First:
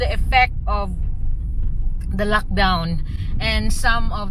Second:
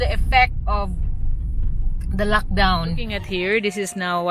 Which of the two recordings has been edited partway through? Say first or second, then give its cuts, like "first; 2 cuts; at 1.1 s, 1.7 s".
second; 1 cut; at 3.1 s